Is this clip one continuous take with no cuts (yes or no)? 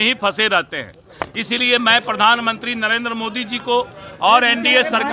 yes